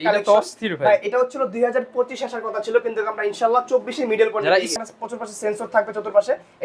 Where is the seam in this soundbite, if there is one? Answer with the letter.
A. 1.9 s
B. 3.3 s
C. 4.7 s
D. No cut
C